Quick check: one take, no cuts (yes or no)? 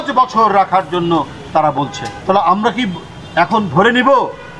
no